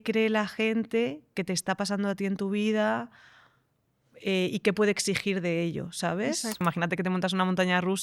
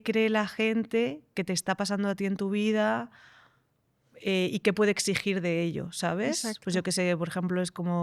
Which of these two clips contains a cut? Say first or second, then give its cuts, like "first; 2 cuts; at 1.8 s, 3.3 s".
first; 1 cut; at 6.6 s